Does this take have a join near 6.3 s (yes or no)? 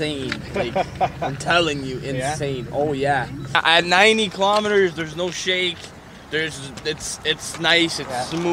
no